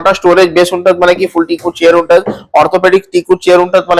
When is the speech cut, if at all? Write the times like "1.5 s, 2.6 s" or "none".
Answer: none